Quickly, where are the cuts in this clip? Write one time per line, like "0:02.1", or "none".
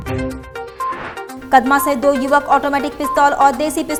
none